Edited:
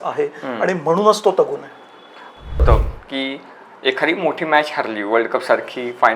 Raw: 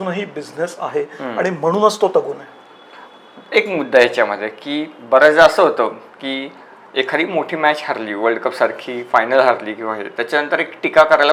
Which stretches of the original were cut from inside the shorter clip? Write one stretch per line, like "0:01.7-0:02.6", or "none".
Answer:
0:03.4-0:05.7